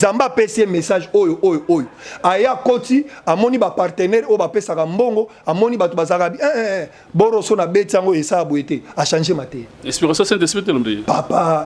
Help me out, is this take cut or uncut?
uncut